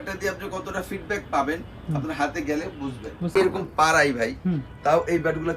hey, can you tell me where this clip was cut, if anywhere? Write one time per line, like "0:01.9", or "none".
0:03.3